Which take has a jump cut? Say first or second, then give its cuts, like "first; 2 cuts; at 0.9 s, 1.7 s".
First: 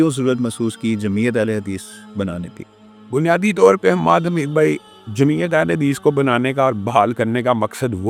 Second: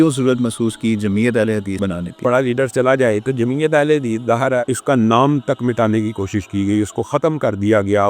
second; 2 cuts; at 2.2 s, 4.7 s